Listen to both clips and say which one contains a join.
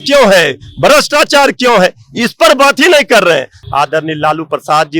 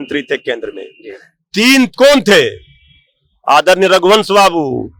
first; 1 cut; at 3.5 s

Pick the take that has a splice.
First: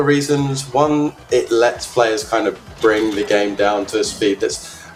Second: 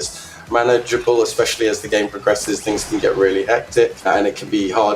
second; 1 cut; at 4.0 s

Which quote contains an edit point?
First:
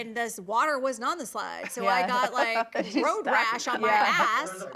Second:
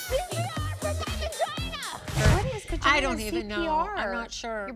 second; 1 cut; at 2.2 s

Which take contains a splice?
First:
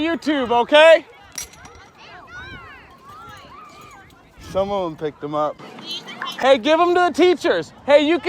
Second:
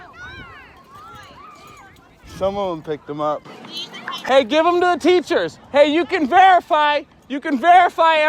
first; 1 cut; at 1.0 s

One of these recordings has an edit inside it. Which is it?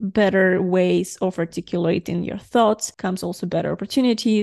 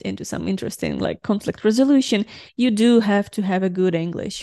first; 1 cut; at 2.9 s

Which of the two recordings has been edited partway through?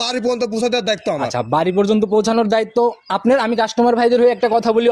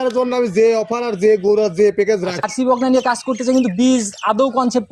second; 1 cut; at 2.4 s

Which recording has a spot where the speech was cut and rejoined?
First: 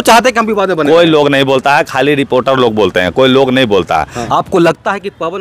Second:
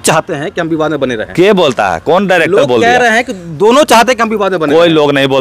first; 1 cut; at 4.2 s

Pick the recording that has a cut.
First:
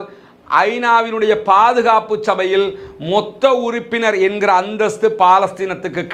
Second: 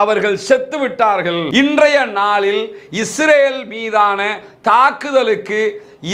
second; 1 cut; at 1.4 s

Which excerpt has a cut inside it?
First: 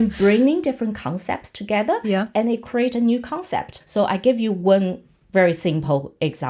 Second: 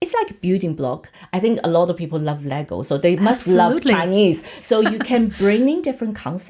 first; 1 cut; at 3.7 s

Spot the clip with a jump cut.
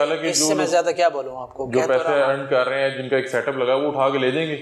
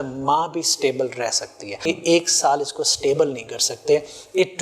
second; 1 cut; at 1.8 s

